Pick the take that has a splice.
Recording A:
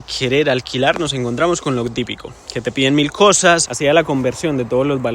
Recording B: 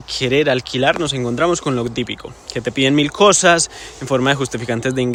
A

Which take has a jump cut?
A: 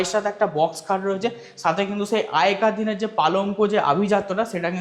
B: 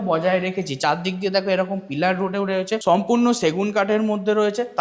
B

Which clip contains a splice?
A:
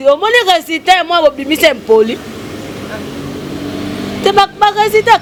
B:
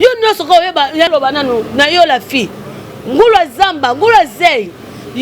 B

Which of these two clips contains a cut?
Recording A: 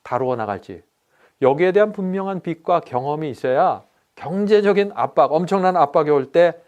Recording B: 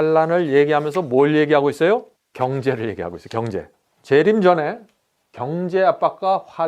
B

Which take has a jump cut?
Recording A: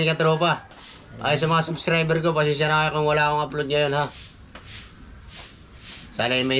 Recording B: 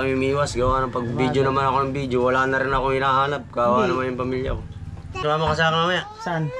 B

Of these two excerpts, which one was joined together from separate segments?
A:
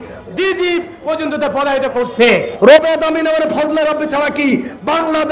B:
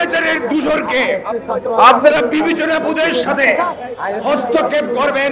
A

